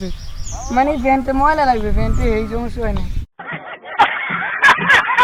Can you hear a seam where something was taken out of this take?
yes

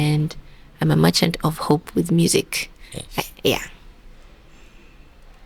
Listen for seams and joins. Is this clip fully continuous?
yes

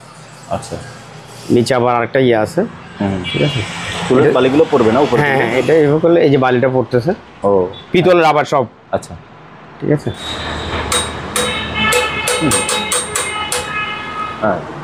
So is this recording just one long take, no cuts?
no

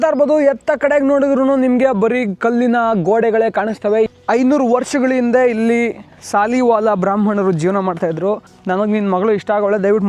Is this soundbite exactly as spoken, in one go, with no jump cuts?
no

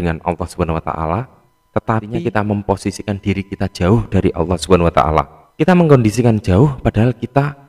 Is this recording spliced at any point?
yes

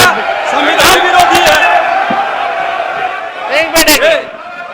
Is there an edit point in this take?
no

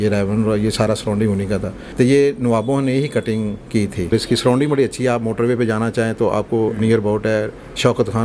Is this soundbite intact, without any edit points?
no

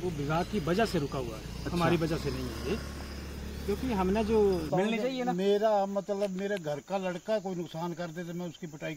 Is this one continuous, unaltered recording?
no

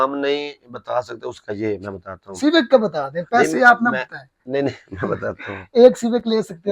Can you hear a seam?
no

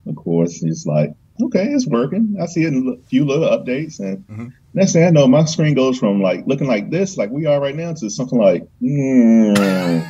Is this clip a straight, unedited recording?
yes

